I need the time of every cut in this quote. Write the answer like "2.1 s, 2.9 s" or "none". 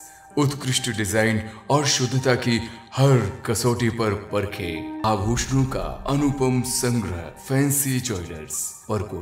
5.0 s

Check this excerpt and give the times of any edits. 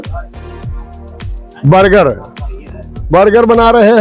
none

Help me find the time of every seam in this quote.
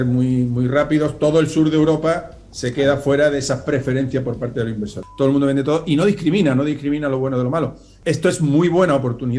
5.0 s, 7.9 s

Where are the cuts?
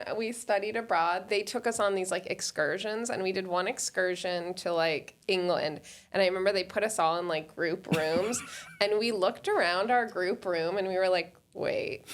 1.2 s, 5.1 s

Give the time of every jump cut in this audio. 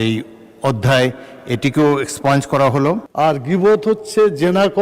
3.1 s

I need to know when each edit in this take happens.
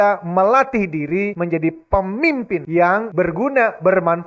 1.3 s, 2.9 s

